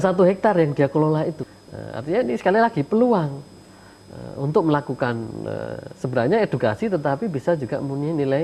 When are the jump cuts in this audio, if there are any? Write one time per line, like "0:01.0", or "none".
0:01.4